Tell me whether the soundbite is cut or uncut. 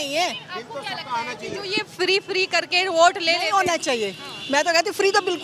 uncut